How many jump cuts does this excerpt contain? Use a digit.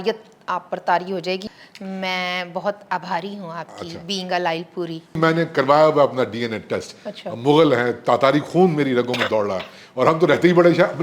2